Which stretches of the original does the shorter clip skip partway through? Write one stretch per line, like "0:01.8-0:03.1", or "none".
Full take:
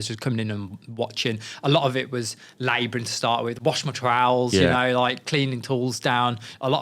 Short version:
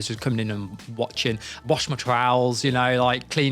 0:01.6-0:03.5